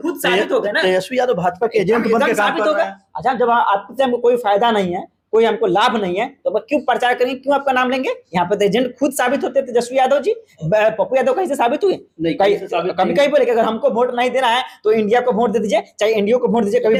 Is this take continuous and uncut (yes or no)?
yes